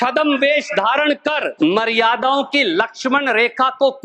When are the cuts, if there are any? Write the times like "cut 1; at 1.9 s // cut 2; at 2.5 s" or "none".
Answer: cut 1; at 1.5 s